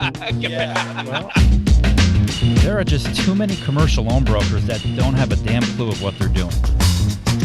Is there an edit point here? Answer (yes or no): yes